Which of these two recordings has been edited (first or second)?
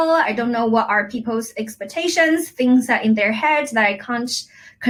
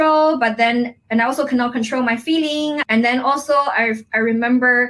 second